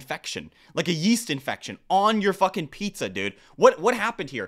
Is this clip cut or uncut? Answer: uncut